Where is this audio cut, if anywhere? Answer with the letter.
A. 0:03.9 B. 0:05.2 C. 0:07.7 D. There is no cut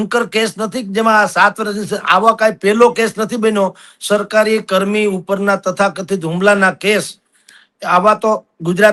D